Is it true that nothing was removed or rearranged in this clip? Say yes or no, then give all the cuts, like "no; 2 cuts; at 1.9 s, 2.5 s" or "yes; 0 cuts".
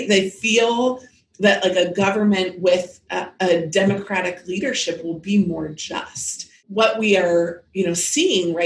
no; 1 cut; at 6.6 s